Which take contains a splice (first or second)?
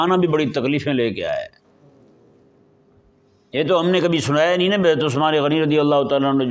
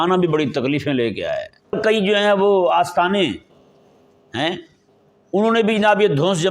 second